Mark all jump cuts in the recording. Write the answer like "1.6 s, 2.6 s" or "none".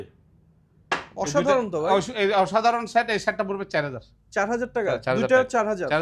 none